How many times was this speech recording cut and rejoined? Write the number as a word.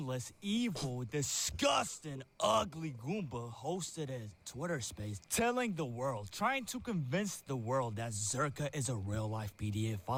zero